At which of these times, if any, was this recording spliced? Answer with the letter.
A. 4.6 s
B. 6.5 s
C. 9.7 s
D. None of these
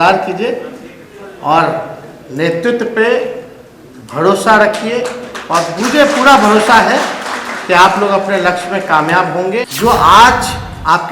C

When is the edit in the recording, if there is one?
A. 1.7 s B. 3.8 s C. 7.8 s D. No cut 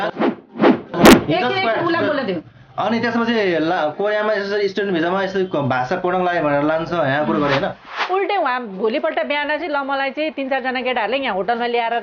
C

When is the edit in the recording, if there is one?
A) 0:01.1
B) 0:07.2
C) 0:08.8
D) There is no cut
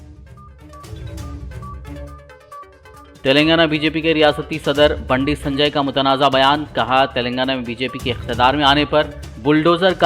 D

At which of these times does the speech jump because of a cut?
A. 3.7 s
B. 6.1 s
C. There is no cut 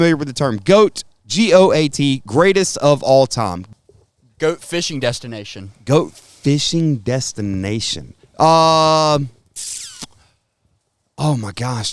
A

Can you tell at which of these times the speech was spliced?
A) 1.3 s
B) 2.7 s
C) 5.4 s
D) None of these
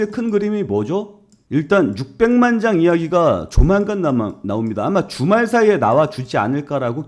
A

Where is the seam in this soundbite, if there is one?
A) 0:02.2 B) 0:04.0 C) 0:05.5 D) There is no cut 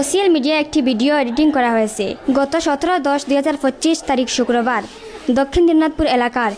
A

